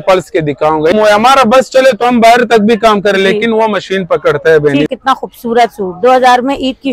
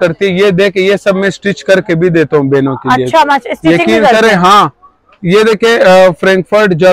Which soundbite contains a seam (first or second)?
first